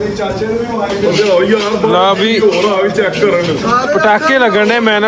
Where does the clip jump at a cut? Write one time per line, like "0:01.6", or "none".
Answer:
none